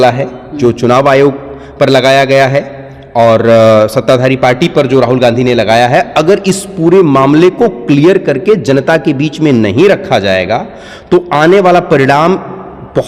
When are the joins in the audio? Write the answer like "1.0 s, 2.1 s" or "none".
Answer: none